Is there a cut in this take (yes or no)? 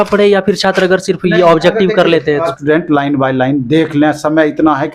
yes